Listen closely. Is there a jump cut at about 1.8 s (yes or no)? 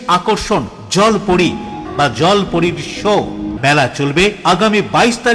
yes